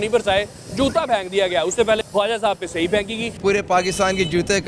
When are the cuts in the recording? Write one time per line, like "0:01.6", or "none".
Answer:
0:02.1
0:03.4